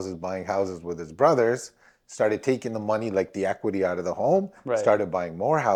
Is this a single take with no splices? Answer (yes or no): yes